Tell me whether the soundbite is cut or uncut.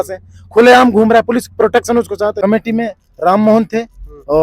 cut